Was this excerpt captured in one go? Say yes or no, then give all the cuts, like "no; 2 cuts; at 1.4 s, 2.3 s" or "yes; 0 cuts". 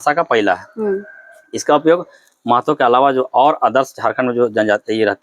yes; 0 cuts